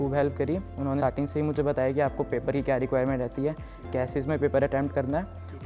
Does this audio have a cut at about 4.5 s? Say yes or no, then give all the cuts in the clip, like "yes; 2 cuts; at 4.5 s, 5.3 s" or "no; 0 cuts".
no; 1 cut; at 1.0 s